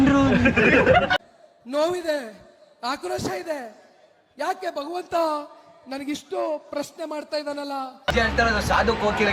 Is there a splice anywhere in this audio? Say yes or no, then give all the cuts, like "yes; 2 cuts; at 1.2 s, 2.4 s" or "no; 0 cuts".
yes; 1 cut; at 8.0 s